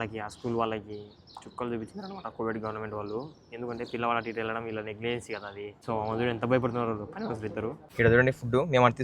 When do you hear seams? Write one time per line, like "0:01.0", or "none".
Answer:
0:05.7
0:07.8